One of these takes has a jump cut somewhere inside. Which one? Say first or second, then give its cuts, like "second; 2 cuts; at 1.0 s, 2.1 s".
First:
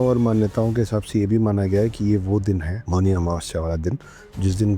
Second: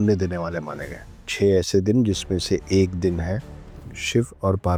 first; 1 cut; at 2.7 s